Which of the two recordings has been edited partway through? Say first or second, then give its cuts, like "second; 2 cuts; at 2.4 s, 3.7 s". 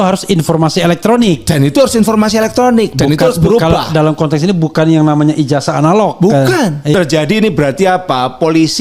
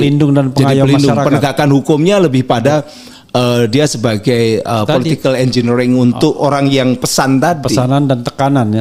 first; 1 cut; at 6.9 s